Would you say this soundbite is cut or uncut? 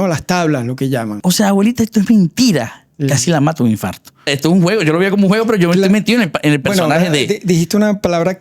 cut